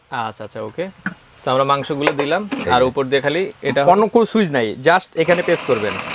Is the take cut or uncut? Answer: uncut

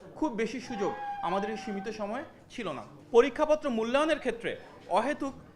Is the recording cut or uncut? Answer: cut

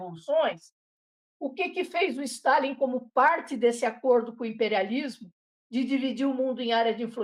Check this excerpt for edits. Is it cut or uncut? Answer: uncut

